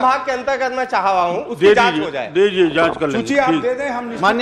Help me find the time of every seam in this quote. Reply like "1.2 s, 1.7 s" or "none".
none